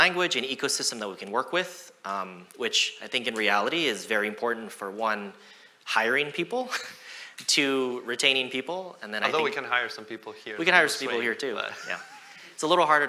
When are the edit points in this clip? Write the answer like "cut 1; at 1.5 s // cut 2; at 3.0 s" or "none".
none